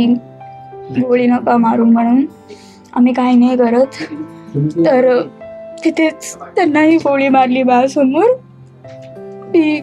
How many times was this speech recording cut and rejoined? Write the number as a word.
zero